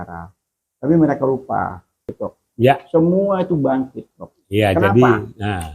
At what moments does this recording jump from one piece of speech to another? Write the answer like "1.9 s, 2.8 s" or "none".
2.0 s